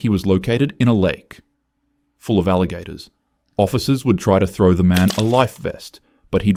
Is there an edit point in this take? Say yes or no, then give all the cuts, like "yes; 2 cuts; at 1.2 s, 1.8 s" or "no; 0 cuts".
no; 0 cuts